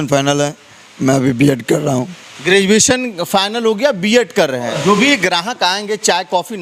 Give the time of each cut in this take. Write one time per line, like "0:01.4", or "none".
0:04.7